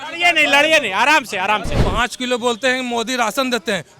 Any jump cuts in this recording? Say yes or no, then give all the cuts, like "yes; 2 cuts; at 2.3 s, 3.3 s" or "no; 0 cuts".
yes; 1 cut; at 1.7 s